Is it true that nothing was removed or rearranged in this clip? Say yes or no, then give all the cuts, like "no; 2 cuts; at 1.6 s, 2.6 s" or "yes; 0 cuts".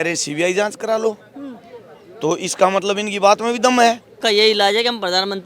no; 1 cut; at 4.1 s